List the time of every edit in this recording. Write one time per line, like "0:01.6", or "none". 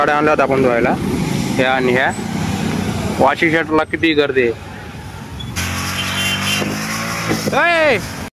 none